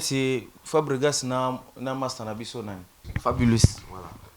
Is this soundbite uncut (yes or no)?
no